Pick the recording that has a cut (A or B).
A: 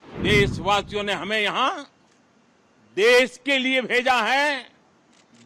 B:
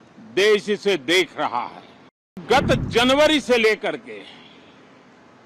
B